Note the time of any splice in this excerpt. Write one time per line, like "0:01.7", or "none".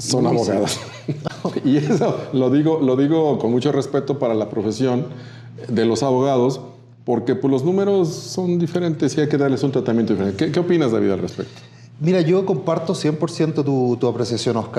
none